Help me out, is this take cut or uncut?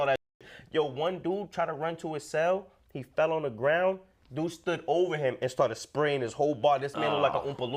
uncut